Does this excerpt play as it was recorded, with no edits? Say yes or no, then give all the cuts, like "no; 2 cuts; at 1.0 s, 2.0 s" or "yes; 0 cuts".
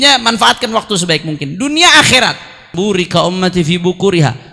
no; 1 cut; at 2.7 s